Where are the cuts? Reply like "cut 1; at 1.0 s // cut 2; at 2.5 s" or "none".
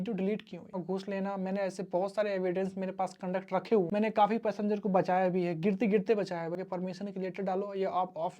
cut 1; at 0.8 s // cut 2; at 3.9 s // cut 3; at 6.6 s